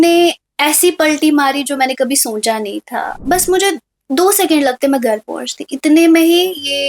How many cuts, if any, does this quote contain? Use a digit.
1